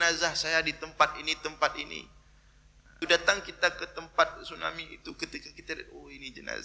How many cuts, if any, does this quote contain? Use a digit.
1